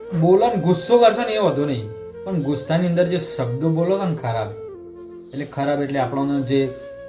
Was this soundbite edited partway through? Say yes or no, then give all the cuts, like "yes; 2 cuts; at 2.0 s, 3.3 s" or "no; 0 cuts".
no; 0 cuts